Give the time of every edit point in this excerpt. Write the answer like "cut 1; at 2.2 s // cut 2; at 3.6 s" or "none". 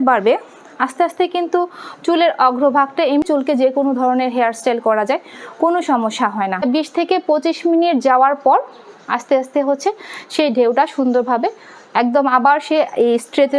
cut 1; at 3.2 s // cut 2; at 6.6 s